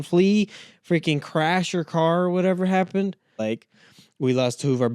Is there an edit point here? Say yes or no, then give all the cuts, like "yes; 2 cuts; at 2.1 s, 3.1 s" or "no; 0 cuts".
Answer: yes; 1 cut; at 3.4 s